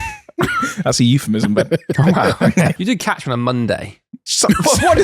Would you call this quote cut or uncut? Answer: cut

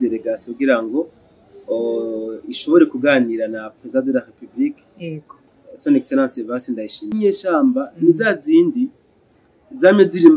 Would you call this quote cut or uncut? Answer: cut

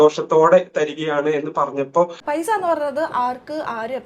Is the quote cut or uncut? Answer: cut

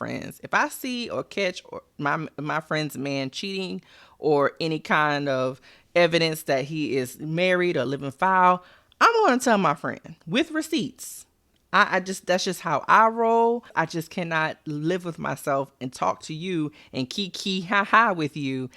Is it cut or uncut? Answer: cut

